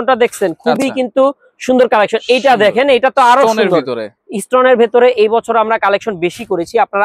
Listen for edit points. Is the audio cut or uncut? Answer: uncut